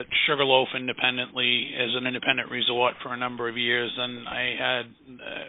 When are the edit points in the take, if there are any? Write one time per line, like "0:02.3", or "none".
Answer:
none